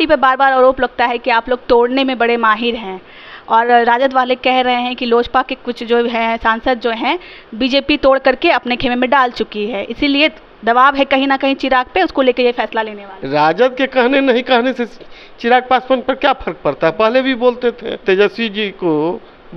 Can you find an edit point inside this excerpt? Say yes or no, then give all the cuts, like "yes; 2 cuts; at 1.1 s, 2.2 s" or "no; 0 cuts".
yes; 2 cuts; at 13.0 s, 18.0 s